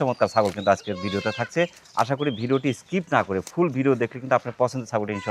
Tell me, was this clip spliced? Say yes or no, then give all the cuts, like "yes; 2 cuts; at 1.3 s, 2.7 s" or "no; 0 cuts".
no; 0 cuts